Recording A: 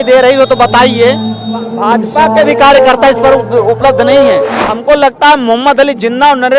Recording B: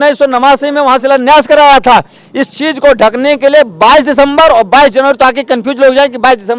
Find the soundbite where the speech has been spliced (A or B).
A